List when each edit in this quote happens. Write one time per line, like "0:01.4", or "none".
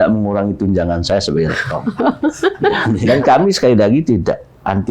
0:03.0